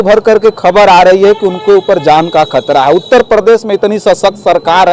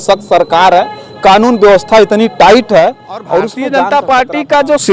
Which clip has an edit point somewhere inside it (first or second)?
second